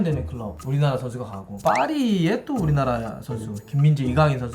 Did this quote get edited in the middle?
yes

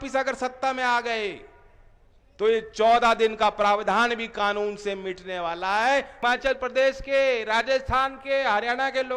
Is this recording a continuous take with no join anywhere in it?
no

